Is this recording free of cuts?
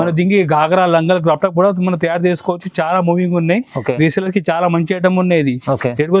yes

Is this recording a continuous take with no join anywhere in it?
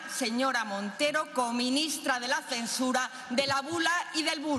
yes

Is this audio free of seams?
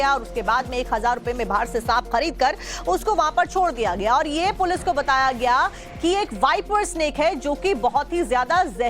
no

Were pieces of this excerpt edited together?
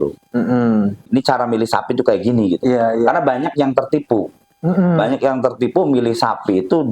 yes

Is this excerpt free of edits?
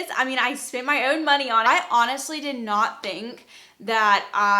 no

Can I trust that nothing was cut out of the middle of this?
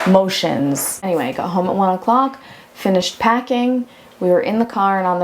no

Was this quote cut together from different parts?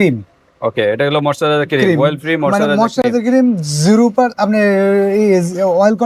no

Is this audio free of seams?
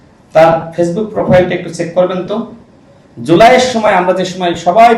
yes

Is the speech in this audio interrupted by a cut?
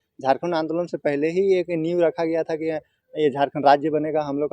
no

